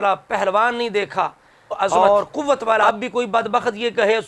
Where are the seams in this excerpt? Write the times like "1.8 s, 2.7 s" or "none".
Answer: 2.8 s

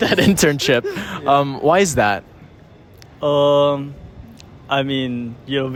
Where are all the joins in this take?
none

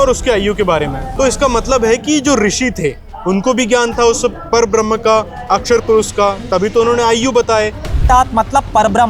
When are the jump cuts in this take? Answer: 8.0 s

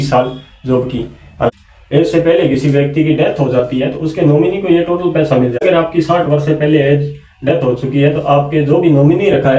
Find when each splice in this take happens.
1.5 s, 5.6 s

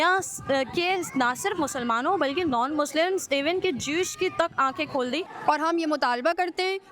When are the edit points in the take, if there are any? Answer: 5.3 s

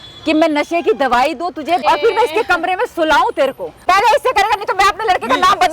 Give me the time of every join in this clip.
1.8 s, 3.8 s

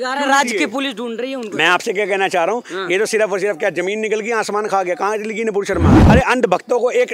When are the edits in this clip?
6.0 s

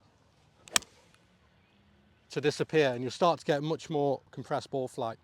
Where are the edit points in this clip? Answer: 4.3 s

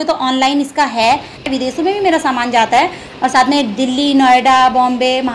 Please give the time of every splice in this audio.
1.4 s

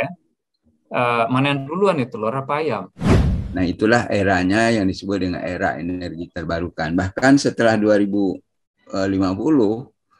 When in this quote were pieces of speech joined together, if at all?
3.0 s

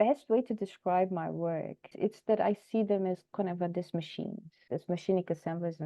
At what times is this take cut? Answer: 1.9 s, 4.6 s

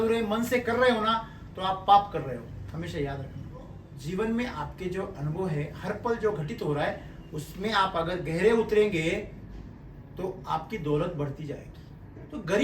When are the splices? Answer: 3.9 s

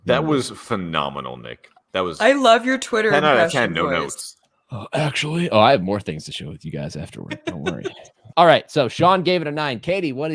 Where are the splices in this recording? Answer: 8.1 s

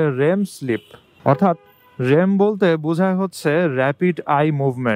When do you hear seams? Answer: none

